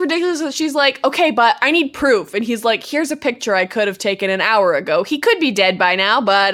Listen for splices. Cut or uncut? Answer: uncut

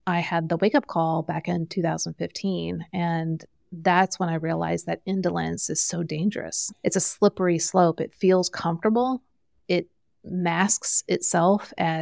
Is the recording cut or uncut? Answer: cut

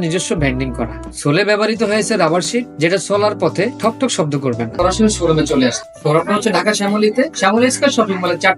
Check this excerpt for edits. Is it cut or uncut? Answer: cut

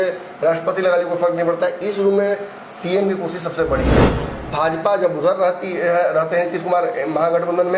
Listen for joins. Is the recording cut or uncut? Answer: cut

